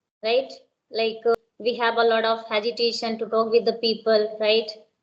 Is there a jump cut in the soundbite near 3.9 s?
no; 1 cut; at 1.3 s

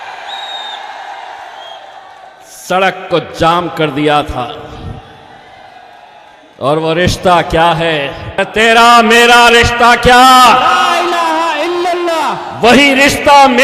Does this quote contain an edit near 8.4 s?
yes; 1 cut; at 8.4 s

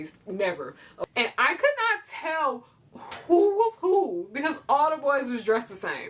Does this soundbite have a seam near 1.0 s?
yes; 1 cut; at 1.0 s

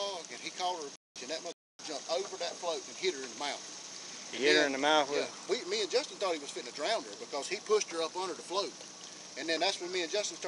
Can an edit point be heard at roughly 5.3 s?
yes; 1 cut; at 5.3 s

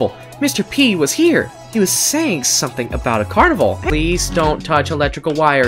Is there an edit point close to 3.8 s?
yes; 1 cut; at 3.8 s

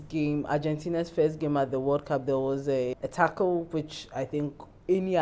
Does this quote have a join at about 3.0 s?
yes; 1 cut; at 3.0 s

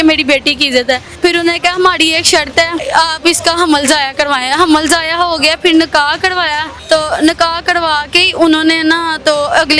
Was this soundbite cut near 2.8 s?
yes; 3 cuts; at 1.1 s, 2.8 s, 6.7 s

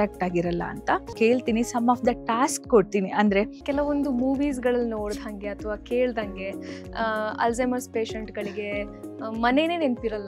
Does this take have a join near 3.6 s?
yes; 2 cuts; at 1.1 s, 3.6 s

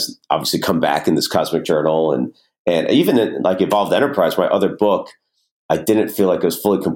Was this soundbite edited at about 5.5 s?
yes; 1 cut; at 5.5 s

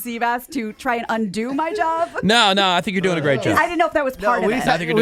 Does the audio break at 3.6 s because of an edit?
yes; 1 cut; at 3.6 s

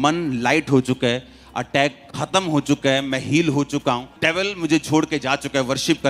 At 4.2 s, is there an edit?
yes; 1 cut; at 4.2 s

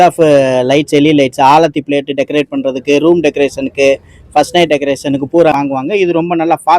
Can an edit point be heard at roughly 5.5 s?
yes; 1 cut; at 5.5 s

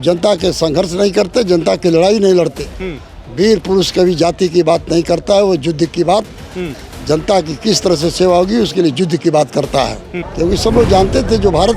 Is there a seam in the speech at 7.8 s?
no; 1 cut; at 10.2 s

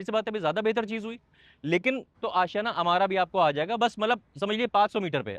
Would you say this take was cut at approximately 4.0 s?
no; 1 cut; at 2.1 s

